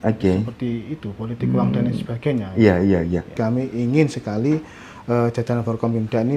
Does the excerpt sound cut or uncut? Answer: cut